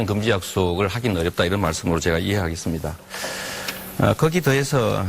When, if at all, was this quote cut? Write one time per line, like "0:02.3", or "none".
0:01.3